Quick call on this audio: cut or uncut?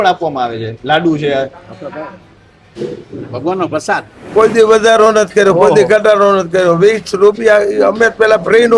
cut